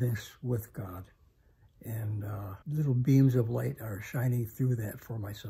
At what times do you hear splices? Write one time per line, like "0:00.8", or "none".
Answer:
0:02.5